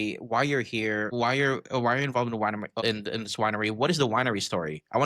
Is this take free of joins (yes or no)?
no